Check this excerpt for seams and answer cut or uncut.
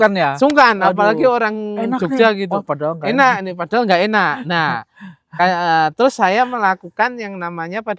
uncut